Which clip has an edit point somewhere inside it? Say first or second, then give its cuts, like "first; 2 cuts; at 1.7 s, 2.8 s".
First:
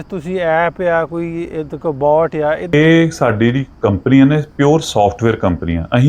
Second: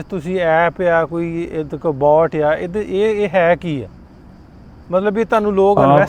first; 1 cut; at 2.7 s